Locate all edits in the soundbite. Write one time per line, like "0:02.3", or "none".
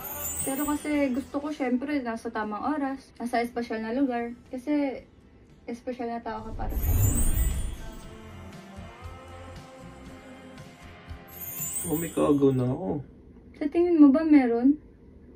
0:11.7